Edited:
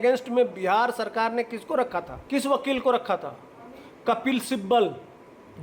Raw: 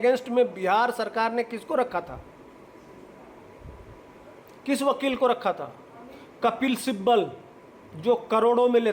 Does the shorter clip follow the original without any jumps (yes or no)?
no